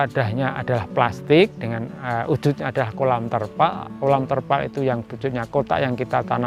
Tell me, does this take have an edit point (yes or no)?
no